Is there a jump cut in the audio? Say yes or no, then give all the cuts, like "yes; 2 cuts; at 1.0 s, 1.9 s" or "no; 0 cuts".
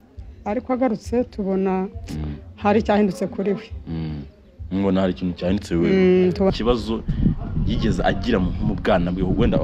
yes; 1 cut; at 6.5 s